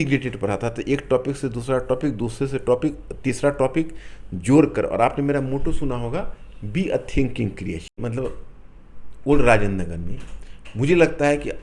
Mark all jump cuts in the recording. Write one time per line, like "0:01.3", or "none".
0:08.0